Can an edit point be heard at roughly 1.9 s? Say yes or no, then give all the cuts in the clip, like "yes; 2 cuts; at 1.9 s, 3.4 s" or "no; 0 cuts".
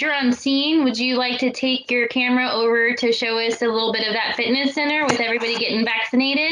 no; 0 cuts